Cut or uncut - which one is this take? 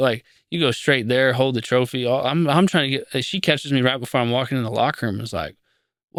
uncut